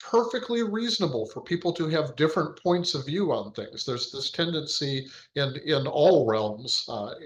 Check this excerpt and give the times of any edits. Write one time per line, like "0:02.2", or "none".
none